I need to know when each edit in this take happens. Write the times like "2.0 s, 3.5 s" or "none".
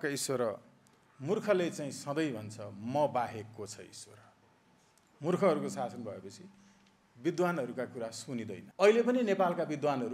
8.6 s